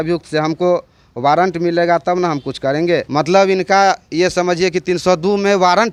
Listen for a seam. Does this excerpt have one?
no; 0 cuts

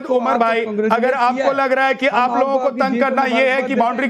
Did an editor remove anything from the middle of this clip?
no; 0 cuts

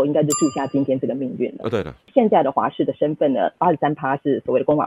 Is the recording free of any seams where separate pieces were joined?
no; 2 cuts; at 2.1 s, 3.5 s

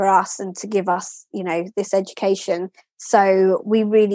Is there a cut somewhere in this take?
no; 0 cuts

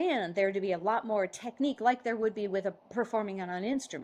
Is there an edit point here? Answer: no; 0 cuts

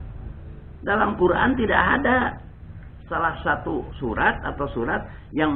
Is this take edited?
no; 0 cuts

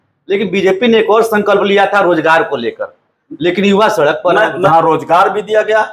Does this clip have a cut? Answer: yes; 1 cut; at 4.6 s

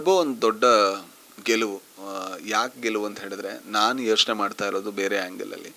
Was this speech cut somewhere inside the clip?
no; 0 cuts

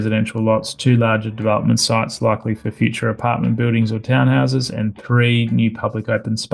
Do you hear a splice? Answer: no; 0 cuts

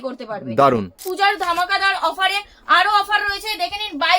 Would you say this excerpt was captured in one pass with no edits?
no; 1 cut; at 1.0 s

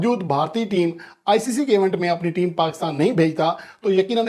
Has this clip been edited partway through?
no; 0 cuts

